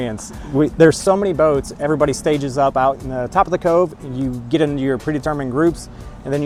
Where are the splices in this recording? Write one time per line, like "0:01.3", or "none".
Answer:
none